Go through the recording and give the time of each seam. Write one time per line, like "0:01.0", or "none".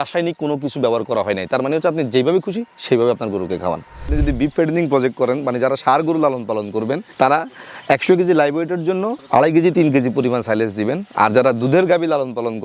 0:04.1